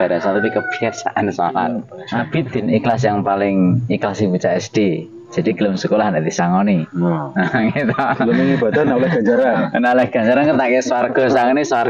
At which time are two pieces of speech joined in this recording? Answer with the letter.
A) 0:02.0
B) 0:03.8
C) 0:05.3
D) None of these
A